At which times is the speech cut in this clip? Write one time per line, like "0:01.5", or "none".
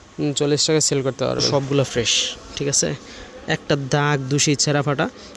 0:01.5